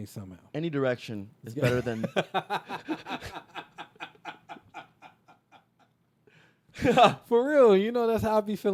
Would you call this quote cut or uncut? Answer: uncut